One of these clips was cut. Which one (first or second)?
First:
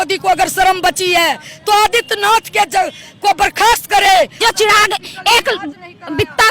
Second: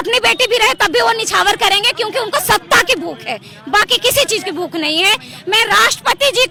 first